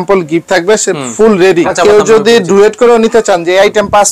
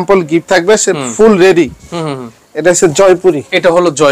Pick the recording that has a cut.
first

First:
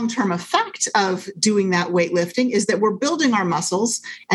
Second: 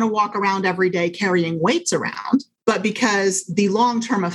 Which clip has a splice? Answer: second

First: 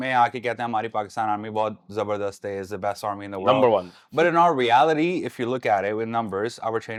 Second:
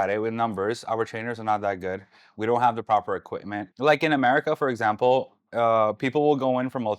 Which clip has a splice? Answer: second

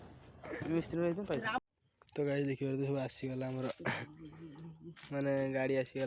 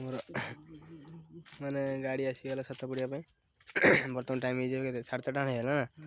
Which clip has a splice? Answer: first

